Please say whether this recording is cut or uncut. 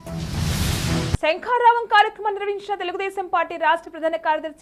uncut